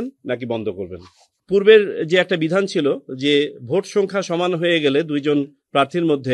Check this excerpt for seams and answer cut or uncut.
cut